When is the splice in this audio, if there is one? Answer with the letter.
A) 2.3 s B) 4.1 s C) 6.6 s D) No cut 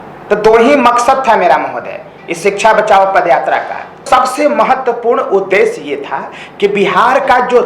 B